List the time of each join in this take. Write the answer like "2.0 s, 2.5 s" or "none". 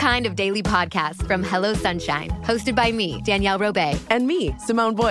none